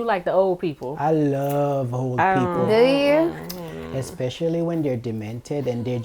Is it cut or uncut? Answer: uncut